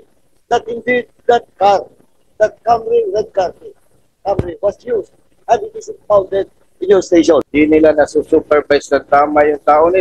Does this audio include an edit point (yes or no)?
yes